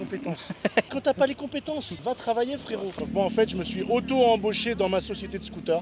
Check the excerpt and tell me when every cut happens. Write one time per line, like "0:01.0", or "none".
0:00.9
0:01.9
0:02.9